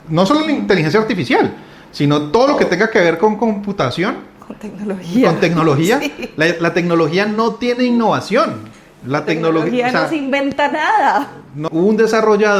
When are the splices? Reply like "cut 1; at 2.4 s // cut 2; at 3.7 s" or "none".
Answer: cut 1; at 11.6 s